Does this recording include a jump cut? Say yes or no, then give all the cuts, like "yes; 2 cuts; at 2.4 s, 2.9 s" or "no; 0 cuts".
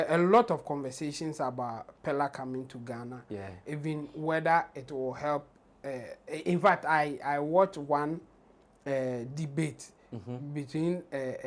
no; 0 cuts